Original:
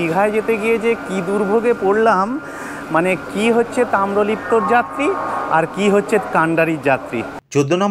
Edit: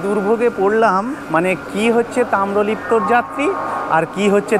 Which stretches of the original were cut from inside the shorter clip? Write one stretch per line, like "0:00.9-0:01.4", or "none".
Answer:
0:02.4-0:02.8